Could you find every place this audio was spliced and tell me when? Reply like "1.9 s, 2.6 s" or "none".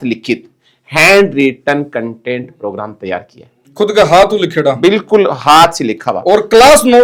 none